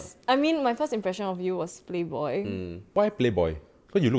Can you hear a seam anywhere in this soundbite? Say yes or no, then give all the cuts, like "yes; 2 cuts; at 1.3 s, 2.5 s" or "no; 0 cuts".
yes; 1 cut; at 2.9 s